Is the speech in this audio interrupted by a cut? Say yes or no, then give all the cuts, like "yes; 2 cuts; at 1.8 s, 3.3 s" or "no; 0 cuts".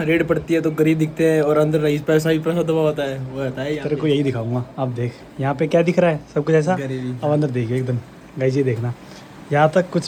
no; 0 cuts